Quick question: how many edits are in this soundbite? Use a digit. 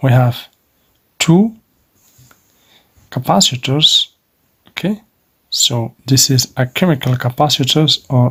0